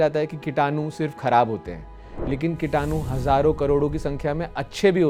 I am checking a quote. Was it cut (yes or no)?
no